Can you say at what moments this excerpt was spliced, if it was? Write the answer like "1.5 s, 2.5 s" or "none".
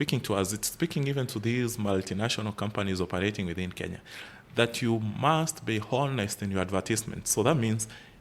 none